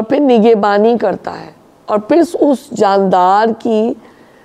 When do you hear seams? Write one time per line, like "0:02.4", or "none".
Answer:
none